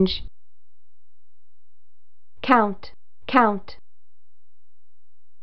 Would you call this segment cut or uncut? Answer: uncut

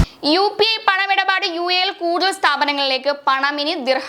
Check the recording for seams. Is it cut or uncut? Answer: uncut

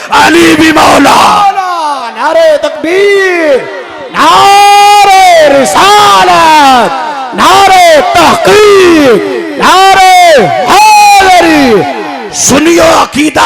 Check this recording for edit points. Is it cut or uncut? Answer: uncut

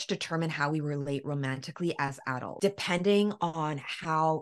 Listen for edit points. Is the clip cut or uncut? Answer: cut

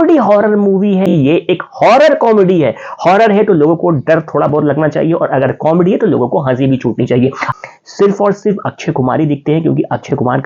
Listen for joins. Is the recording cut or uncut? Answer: cut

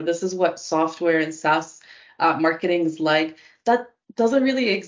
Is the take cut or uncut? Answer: uncut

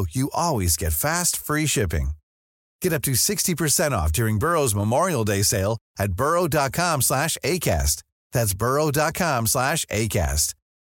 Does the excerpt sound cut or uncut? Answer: uncut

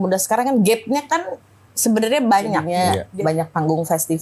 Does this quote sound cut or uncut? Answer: cut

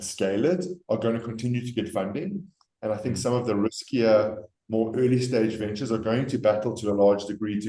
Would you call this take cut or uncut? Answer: uncut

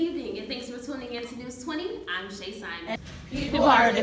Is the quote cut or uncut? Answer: cut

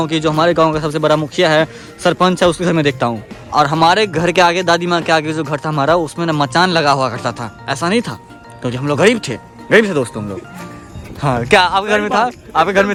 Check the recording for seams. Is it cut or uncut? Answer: uncut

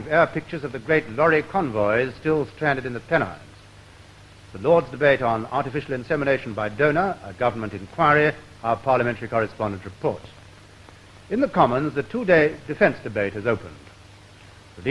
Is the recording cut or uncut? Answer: cut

